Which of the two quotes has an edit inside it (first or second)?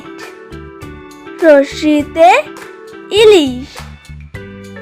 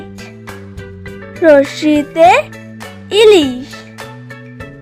first